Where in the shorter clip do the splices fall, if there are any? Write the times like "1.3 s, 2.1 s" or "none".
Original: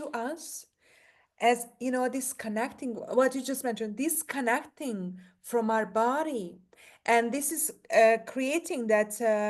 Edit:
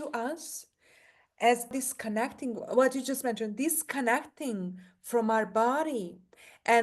1.7 s